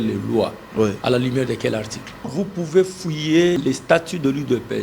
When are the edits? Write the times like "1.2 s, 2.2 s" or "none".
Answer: 2.3 s, 3.6 s